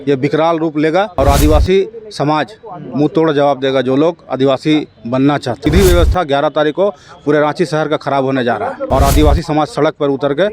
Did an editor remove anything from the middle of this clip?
yes; 3 cuts; at 1.1 s, 5.6 s, 8.8 s

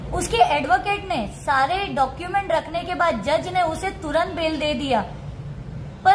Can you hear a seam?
no; 0 cuts

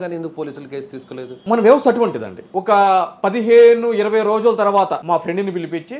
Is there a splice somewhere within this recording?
no; 0 cuts

